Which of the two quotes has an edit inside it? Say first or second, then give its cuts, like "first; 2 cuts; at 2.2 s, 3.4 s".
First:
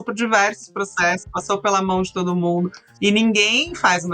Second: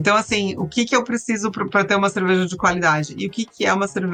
first; 1 cut; at 2.8 s